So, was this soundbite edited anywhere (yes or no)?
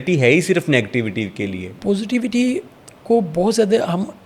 yes